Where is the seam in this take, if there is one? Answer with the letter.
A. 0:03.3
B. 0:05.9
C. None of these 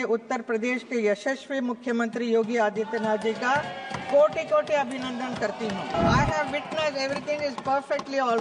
B